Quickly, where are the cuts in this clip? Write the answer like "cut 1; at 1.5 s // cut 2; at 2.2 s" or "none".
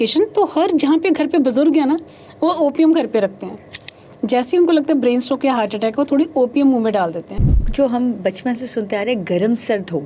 cut 1; at 7.6 s